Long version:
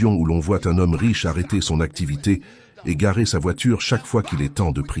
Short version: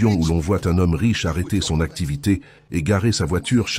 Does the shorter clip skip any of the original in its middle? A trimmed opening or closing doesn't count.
yes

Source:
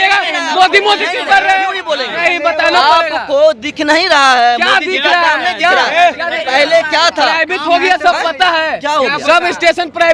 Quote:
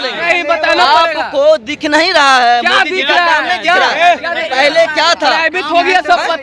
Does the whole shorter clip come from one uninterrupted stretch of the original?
yes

